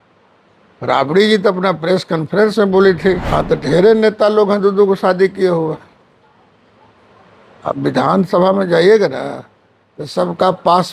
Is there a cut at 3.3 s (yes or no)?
yes